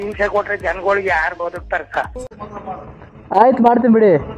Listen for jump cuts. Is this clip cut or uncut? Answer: cut